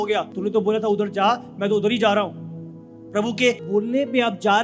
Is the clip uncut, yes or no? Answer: yes